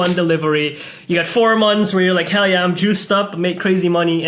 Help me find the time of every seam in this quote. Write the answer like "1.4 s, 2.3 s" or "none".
none